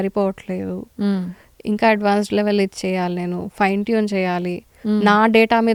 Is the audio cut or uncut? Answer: uncut